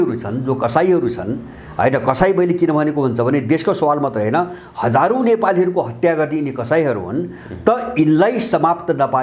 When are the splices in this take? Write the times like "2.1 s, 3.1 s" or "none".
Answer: none